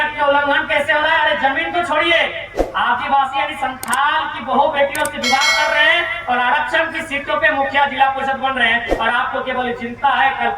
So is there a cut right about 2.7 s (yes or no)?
no